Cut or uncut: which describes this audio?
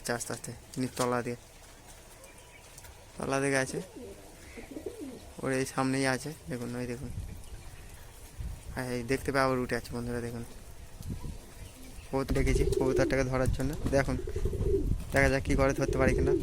cut